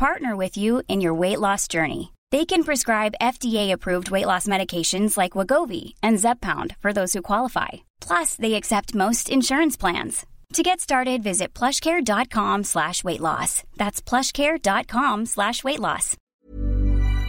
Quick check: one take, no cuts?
no; 1 cut; at 16.1 s

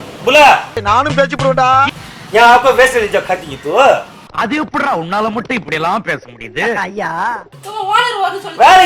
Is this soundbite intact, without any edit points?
no; 2 cuts; at 2.0 s, 7.6 s

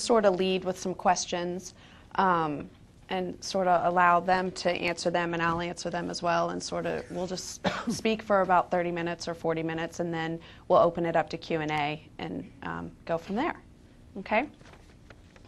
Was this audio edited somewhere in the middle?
no; 0 cuts

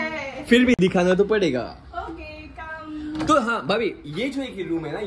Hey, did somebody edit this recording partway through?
no; 0 cuts

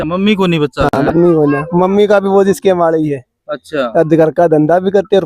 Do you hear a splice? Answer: no; 0 cuts

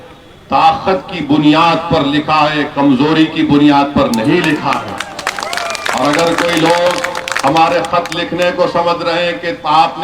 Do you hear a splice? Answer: no; 0 cuts

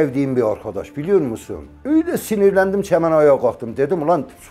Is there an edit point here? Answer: no; 0 cuts

